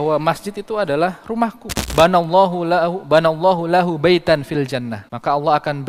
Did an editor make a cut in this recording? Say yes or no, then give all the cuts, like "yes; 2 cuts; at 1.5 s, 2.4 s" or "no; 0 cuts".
yes; 1 cut; at 1.8 s